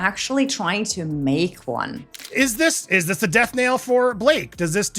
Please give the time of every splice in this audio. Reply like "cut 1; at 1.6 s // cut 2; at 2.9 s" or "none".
cut 1; at 2.2 s